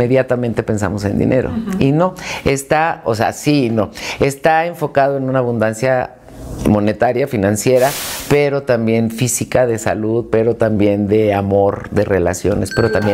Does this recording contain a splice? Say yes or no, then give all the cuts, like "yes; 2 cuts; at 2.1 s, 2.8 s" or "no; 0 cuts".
no; 0 cuts